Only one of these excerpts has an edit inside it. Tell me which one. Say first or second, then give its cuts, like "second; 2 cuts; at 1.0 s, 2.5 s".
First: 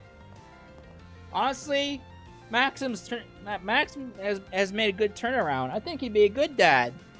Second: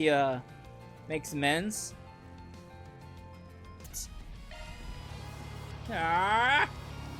second; 1 cut; at 3.8 s